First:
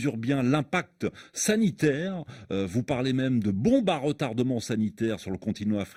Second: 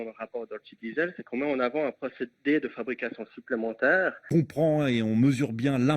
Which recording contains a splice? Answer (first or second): second